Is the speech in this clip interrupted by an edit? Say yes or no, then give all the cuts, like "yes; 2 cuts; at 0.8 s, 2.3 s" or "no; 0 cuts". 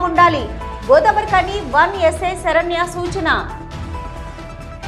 no; 0 cuts